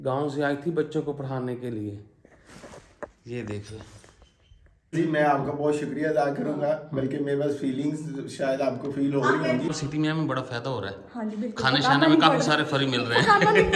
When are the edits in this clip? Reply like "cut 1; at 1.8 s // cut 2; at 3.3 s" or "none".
cut 1; at 4.9 s // cut 2; at 9.7 s